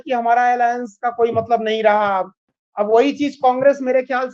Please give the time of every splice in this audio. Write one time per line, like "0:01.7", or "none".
none